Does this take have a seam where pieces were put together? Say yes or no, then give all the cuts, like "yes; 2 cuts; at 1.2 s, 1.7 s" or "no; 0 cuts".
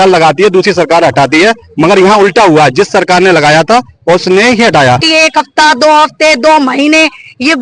yes; 1 cut; at 5.0 s